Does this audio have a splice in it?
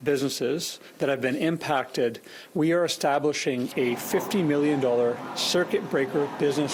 no; 0 cuts

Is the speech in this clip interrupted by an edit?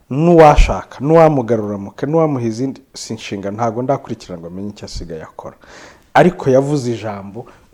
no; 0 cuts

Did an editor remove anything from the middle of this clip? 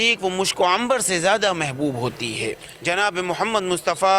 yes; 1 cut; at 2.7 s

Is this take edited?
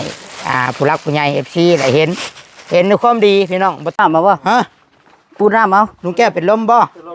yes; 1 cut; at 4.0 s

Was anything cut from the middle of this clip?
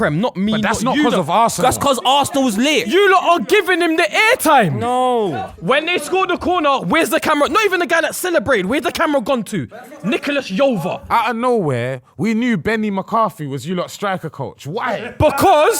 yes; 4 cuts; at 1.6 s, 2.9 s, 5.3 s, 11.0 s

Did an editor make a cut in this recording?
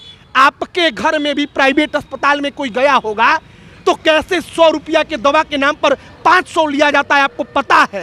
no; 0 cuts

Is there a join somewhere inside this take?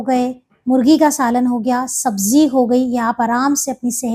no; 0 cuts

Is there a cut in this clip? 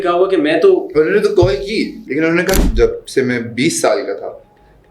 yes; 1 cut; at 2.6 s

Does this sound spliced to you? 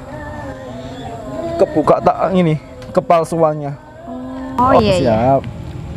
yes; 1 cut; at 4.7 s

